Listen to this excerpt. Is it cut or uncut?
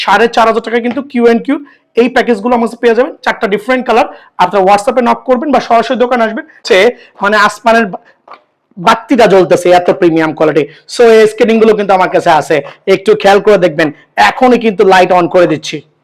cut